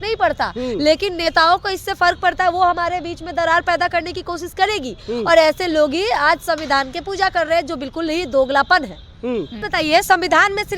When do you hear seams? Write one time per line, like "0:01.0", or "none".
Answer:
0:09.7